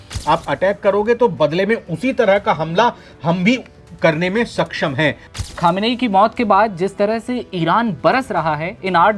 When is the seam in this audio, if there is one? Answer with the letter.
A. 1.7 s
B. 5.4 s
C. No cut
B